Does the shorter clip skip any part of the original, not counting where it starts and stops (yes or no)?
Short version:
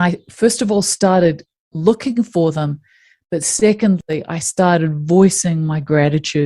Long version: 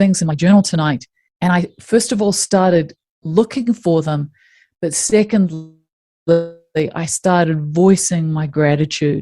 yes